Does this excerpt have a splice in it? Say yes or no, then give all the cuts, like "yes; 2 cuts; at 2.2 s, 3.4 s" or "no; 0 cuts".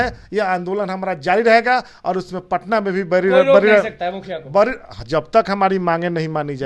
no; 0 cuts